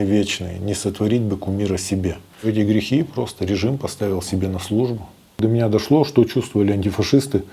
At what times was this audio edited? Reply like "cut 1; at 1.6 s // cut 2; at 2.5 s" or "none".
cut 1; at 2.5 s // cut 2; at 5.4 s